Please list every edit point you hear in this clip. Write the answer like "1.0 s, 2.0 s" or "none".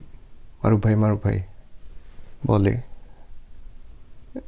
none